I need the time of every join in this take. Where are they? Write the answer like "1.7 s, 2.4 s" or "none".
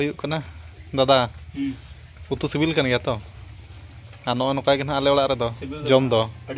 none